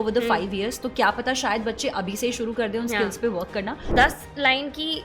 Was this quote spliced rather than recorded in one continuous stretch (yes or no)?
yes